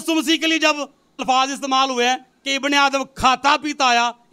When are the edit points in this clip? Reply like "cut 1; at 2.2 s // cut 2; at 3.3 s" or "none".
cut 1; at 1.2 s

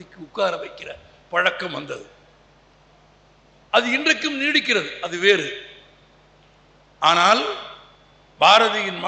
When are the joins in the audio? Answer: none

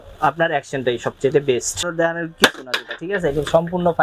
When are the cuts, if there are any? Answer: cut 1; at 1.8 s

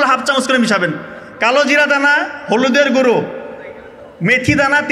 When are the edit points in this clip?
none

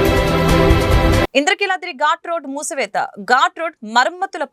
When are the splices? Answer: cut 1; at 1.2 s

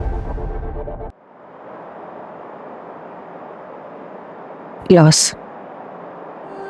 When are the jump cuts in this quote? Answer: cut 1; at 1.3 s

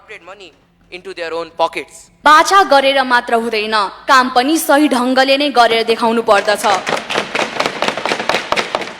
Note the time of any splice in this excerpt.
cut 1; at 2.1 s

